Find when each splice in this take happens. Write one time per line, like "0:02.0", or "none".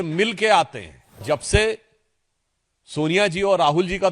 0:01.2